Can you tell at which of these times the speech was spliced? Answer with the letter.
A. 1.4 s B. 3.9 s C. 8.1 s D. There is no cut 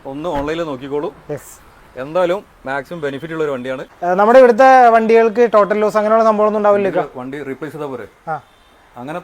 B